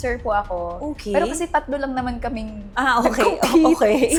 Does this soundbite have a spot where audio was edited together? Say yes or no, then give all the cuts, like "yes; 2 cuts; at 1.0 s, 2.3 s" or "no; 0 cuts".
no; 0 cuts